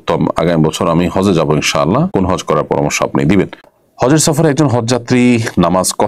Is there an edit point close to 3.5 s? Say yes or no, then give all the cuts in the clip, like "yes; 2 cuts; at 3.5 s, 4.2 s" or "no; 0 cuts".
yes; 1 cut; at 3.5 s